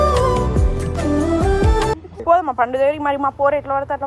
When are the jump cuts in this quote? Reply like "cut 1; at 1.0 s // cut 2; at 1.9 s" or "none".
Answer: cut 1; at 2.1 s